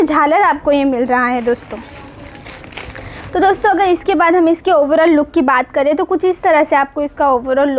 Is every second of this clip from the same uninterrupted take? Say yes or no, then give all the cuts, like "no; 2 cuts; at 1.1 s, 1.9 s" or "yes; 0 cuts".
yes; 0 cuts